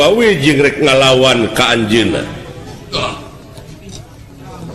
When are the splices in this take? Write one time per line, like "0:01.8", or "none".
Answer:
none